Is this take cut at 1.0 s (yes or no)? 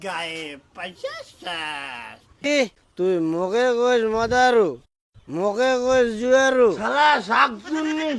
no